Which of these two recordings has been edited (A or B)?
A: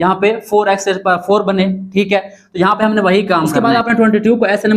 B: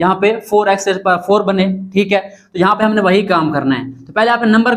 A